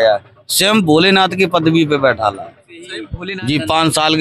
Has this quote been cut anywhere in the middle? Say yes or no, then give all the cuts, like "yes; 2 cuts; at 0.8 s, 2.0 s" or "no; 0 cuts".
yes; 1 cut; at 3.0 s